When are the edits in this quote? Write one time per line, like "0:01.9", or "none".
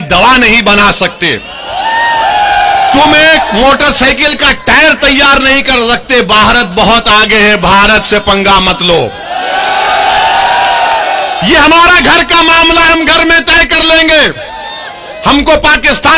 none